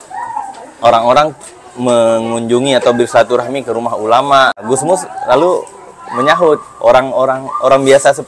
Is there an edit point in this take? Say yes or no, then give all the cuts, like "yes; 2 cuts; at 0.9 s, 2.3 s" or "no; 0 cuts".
yes; 1 cut; at 4.6 s